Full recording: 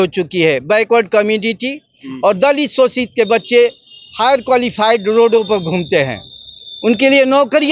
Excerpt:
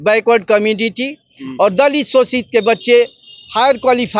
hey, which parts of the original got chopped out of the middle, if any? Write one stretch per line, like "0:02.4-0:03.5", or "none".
none